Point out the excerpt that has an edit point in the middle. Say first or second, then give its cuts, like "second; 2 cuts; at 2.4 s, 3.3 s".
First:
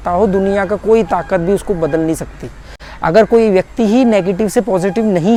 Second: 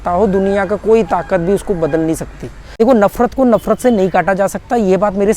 second; 1 cut; at 2.7 s